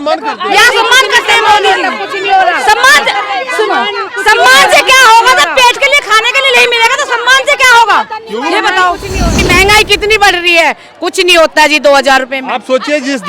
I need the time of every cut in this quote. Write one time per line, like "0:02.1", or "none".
0:09.5